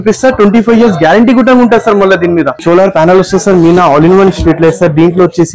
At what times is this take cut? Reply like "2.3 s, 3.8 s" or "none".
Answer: 2.5 s